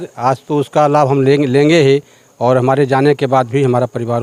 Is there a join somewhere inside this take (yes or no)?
no